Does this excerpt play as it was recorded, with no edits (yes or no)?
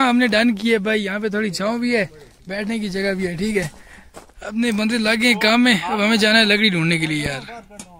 yes